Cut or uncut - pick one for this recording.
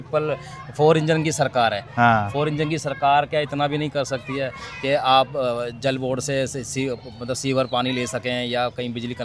uncut